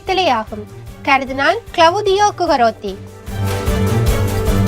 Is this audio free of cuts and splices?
no; 1 cut; at 3.3 s

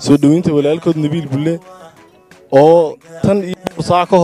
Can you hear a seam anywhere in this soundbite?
no; 0 cuts

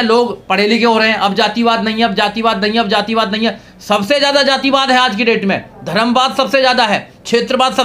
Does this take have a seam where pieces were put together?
no; 0 cuts

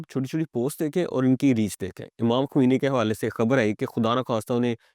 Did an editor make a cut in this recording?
no; 0 cuts

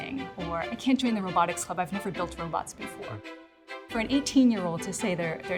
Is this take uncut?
yes; 0 cuts

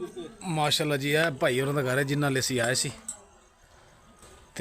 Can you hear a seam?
no; 0 cuts

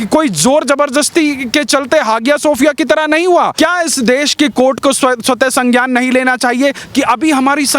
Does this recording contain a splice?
yes; 2 cuts; at 3.5 s, 6.8 s

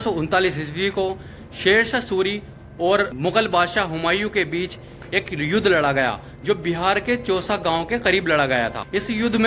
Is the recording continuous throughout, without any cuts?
yes; 0 cuts

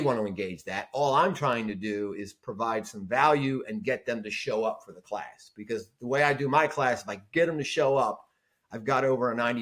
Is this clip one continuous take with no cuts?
yes; 0 cuts

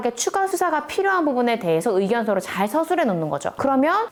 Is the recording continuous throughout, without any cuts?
yes; 0 cuts

